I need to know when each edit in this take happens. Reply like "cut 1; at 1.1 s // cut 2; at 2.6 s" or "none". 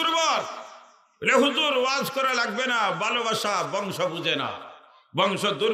none